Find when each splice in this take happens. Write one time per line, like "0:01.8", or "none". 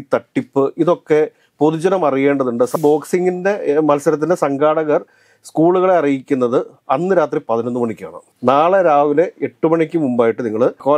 0:02.8

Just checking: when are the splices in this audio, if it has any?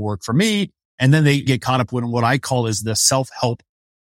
0:01.5

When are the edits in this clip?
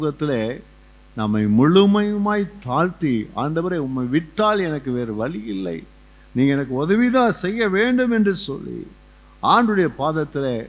none

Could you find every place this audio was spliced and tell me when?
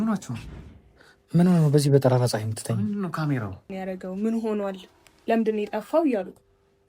0:03.6

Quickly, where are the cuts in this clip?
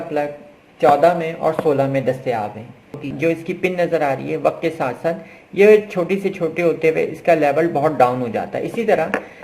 0:03.1

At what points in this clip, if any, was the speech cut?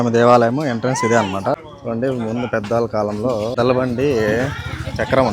0:01.6
0:03.5

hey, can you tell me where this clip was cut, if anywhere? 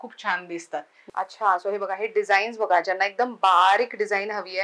0:01.0

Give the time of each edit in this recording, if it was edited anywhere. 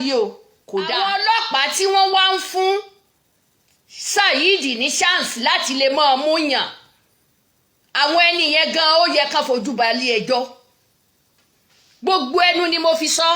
0:00.9

